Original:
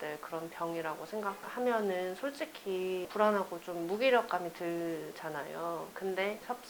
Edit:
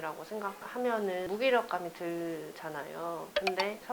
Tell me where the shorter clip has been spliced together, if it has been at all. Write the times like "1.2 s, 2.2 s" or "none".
1.3 s

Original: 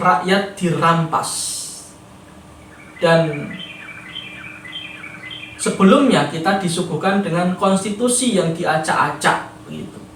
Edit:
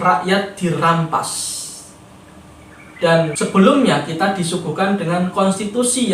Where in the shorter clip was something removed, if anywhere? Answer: 3.3 s

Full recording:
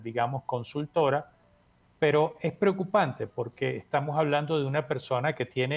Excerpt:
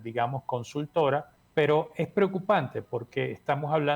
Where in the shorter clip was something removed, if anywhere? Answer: 1.4 s

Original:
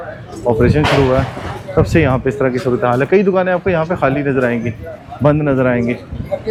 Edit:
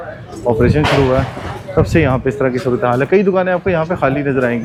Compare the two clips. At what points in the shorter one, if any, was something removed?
none

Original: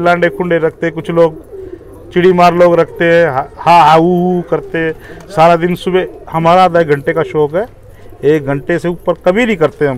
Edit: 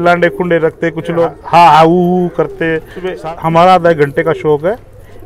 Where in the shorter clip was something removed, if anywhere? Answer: 1.3 s, 3.1 s

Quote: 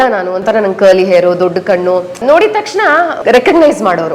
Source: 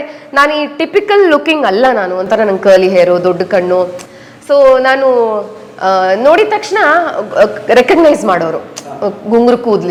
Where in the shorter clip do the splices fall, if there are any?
2.2 s, 3.2 s

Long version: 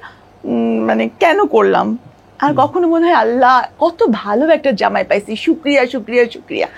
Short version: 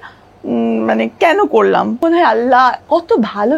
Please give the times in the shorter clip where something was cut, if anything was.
2.0 s

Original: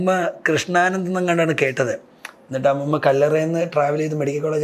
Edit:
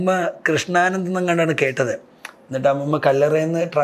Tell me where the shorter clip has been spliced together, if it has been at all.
none

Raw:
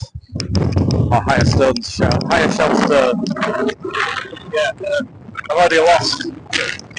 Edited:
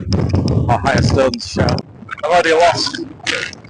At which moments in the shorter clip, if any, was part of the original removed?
1.8 s

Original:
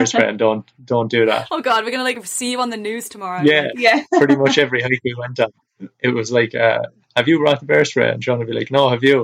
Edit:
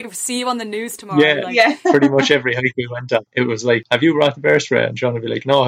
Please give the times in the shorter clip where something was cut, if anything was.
1.1 s, 3.7 s

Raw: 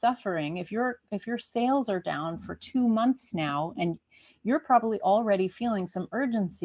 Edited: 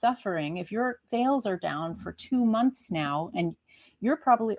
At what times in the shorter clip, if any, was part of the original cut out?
1.0 s

